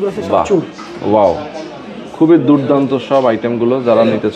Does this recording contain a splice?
no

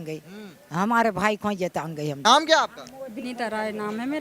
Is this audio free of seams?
yes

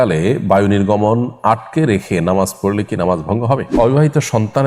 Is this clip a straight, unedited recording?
no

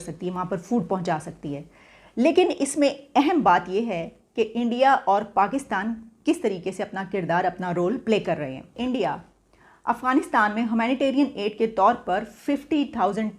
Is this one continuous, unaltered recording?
no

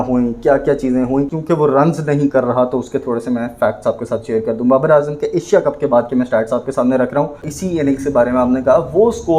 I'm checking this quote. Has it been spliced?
yes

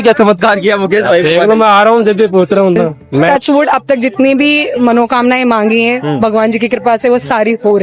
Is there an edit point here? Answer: yes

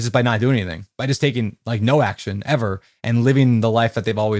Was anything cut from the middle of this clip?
no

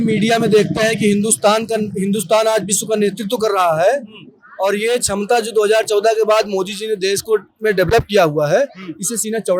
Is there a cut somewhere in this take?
no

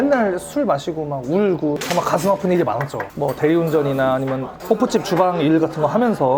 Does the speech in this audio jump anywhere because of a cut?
yes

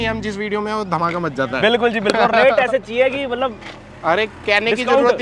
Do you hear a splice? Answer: no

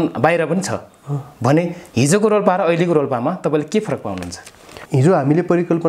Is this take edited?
yes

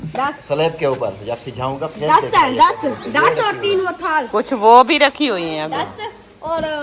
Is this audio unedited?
yes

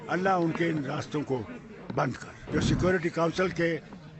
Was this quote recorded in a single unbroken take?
no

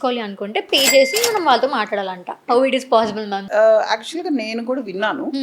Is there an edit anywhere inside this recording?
yes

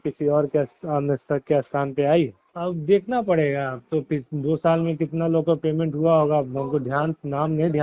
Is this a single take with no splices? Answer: no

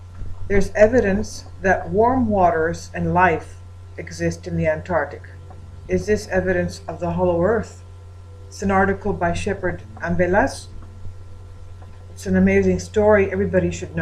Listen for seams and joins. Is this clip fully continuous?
no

